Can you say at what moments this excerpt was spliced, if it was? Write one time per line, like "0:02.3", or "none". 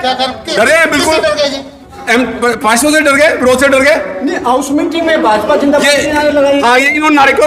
none